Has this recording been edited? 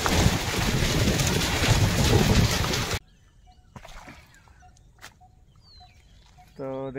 yes; 1 cut; at 2.9 s

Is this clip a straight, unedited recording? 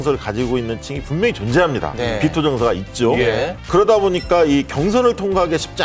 yes; 0 cuts

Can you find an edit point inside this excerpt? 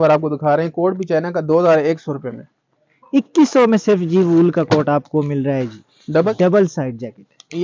yes; 1 cut; at 6.3 s

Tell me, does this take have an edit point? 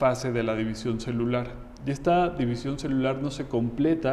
no; 0 cuts

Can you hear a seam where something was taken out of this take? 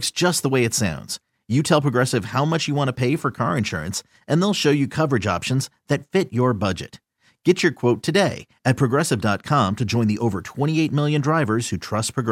no; 0 cuts

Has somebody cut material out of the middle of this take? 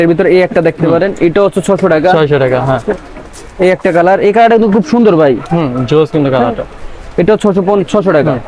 no; 0 cuts

